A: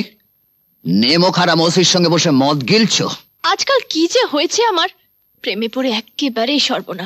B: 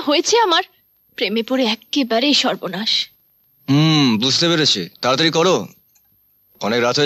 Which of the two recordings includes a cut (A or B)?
A